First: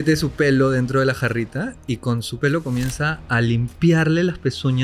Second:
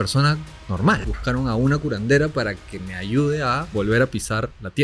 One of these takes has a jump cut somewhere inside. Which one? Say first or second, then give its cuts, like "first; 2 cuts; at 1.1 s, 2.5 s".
second; 2 cuts; at 1.0 s, 3.6 s